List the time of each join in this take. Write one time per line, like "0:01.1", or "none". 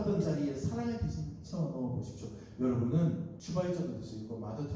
0:03.4